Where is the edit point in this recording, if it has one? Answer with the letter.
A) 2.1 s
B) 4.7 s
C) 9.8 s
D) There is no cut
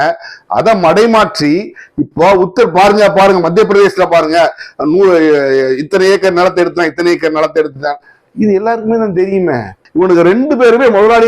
C